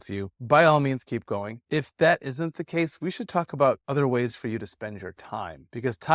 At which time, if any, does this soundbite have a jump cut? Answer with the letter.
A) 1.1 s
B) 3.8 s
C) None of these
B